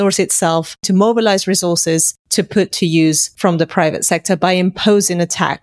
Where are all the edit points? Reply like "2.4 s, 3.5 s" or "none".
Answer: 0.8 s, 2.2 s, 3.3 s